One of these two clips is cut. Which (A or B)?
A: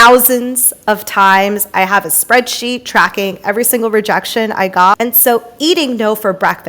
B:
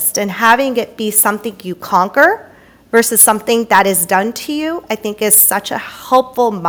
A